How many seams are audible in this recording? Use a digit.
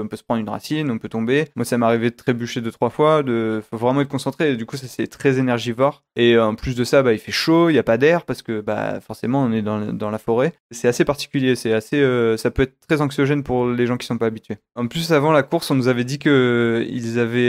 3